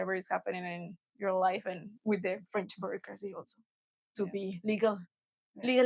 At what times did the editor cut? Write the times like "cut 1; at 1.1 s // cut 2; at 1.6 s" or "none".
none